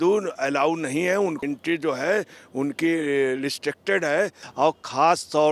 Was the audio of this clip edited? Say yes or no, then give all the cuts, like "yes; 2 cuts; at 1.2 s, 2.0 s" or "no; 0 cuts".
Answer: yes; 2 cuts; at 1.4 s, 4.4 s